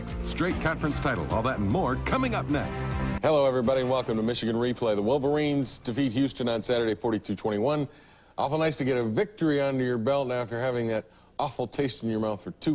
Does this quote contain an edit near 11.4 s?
yes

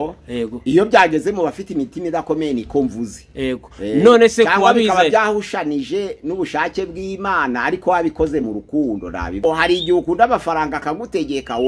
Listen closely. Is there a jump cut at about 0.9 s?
no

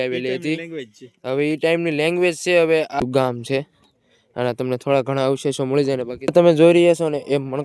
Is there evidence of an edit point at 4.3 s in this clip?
no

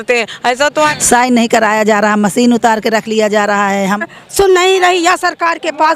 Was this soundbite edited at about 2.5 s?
no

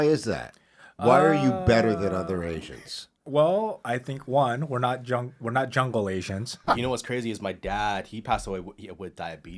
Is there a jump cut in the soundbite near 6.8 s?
yes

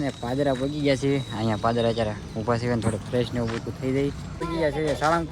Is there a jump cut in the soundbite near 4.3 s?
yes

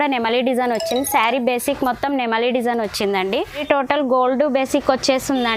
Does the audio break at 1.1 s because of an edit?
no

